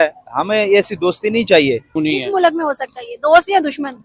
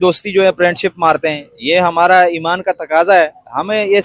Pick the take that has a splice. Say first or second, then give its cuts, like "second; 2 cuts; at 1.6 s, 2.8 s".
first; 1 cut; at 2.0 s